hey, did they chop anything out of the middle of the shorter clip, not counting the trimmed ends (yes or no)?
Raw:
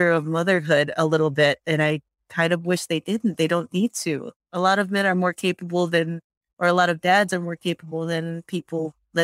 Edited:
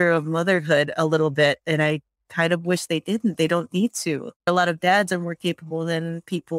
yes